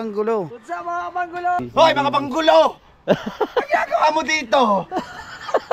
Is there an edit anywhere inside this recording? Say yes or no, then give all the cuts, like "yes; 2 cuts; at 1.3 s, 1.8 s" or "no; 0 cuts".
yes; 1 cut; at 1.6 s